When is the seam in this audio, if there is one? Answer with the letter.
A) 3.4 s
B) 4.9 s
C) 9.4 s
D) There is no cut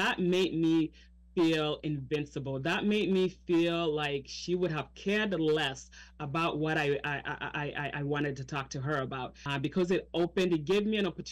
C